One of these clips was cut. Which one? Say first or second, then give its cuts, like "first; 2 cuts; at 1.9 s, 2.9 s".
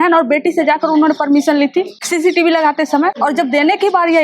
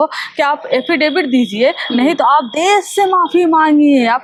first; 2 cuts; at 2.0 s, 3.2 s